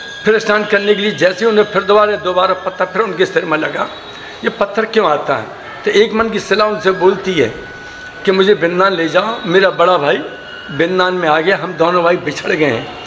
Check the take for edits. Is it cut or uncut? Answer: uncut